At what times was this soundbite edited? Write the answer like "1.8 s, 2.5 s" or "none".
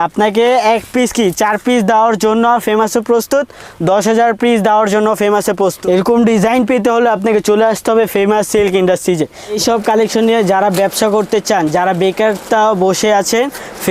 5.8 s, 9.6 s